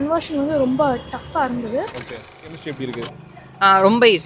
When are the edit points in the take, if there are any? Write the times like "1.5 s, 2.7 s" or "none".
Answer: 2.4 s